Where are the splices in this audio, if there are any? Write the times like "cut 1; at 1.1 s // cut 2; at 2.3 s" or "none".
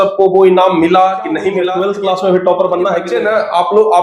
cut 1; at 1.6 s // cut 2; at 3.1 s